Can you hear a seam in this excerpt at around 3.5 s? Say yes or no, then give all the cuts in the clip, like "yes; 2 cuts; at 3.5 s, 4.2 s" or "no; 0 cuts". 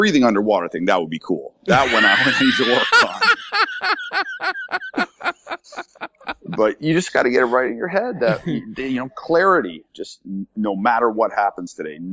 no; 0 cuts